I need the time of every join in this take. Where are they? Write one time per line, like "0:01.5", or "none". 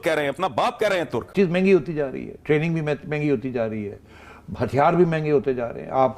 0:01.3